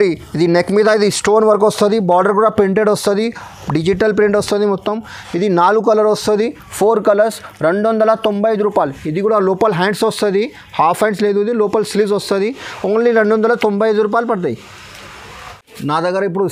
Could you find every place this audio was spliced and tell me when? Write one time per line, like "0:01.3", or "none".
none